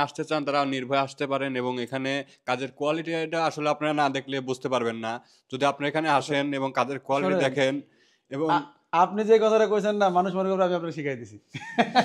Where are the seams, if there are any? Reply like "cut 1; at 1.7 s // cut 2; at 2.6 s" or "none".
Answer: none